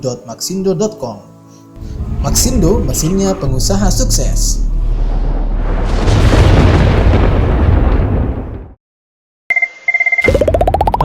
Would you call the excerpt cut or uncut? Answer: cut